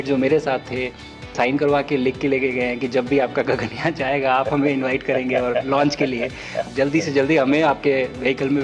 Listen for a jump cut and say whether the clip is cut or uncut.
cut